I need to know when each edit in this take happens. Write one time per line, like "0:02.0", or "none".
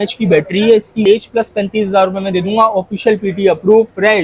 0:01.0